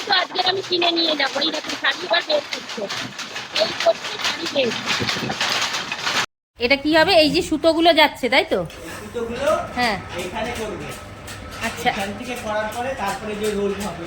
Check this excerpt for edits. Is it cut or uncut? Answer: cut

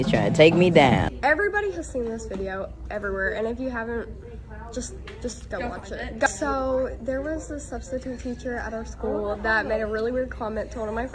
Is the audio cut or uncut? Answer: uncut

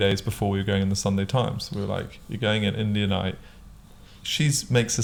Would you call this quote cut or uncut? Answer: uncut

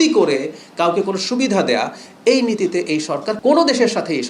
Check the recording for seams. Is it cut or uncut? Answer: cut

